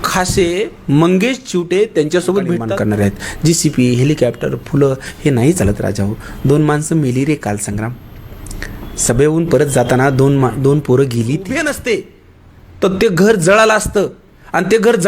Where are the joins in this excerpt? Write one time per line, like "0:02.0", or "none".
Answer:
0:02.7
0:11.6